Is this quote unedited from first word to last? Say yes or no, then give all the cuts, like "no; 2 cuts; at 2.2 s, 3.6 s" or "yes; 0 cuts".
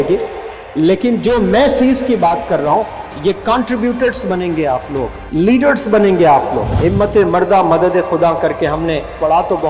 no; 2 cuts; at 5.2 s, 6.7 s